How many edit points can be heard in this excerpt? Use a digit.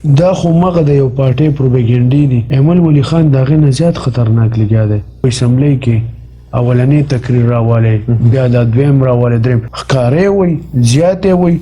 3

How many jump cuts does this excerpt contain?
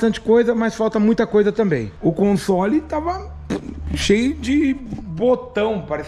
1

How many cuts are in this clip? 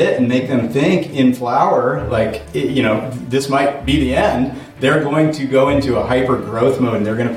0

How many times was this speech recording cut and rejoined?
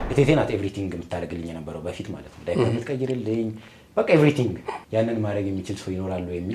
1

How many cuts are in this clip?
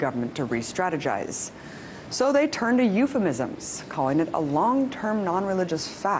1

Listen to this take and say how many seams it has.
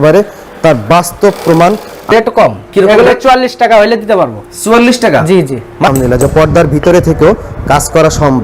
2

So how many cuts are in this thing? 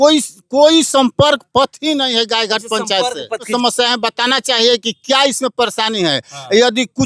1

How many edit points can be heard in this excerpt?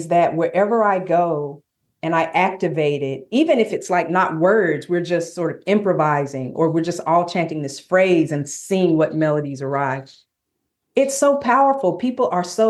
0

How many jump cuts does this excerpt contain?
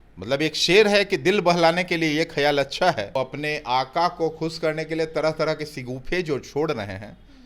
1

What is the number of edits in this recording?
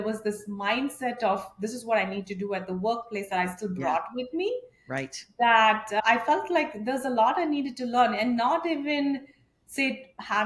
0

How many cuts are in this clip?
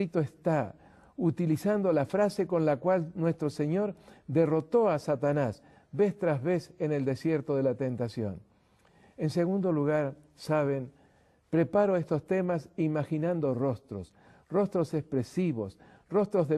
1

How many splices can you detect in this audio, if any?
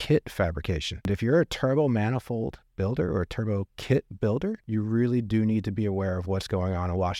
2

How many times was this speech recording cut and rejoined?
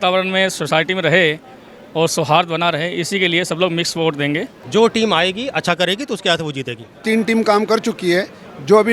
2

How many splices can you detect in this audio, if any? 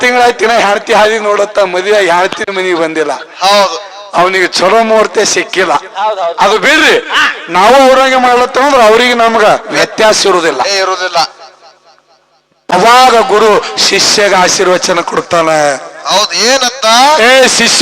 1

